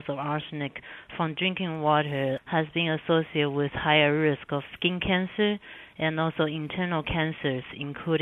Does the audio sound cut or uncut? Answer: uncut